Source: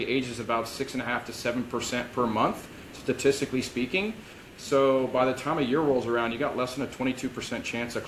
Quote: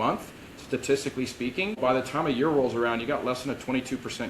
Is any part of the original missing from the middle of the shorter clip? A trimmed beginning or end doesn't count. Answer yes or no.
yes